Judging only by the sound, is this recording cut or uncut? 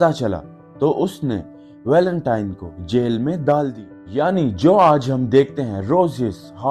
cut